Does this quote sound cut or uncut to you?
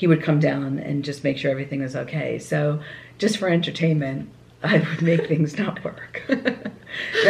uncut